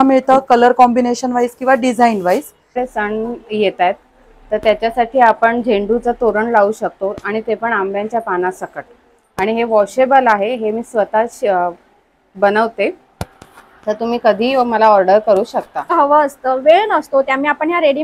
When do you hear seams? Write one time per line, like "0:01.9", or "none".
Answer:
0:02.8
0:15.9